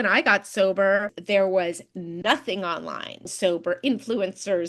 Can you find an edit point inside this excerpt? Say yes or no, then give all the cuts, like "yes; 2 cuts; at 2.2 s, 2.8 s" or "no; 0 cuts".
yes; 2 cuts; at 1.1 s, 3.3 s